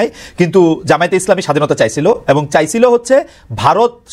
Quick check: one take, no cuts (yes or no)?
yes